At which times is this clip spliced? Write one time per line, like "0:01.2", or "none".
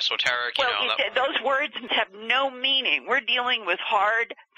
0:01.9